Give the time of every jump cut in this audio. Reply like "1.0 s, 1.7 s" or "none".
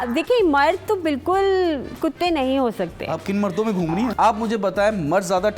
4.1 s